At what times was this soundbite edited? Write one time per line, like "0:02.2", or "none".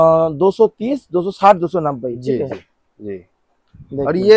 none